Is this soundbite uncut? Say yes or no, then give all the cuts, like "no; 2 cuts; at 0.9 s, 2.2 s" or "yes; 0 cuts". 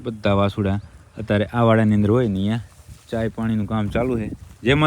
yes; 0 cuts